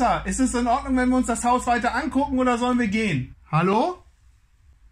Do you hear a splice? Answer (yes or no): yes